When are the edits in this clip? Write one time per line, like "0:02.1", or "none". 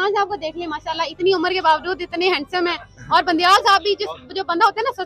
none